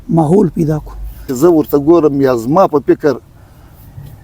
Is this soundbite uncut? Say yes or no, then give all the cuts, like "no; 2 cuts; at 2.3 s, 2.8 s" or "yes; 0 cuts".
no; 1 cut; at 1.2 s